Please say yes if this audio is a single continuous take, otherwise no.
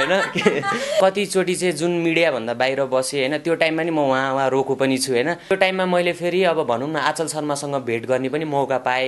no